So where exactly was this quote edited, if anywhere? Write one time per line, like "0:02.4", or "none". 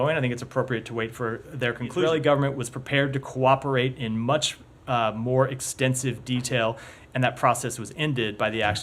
0:02.0